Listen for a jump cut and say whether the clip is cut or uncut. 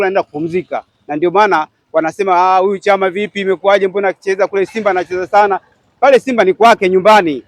uncut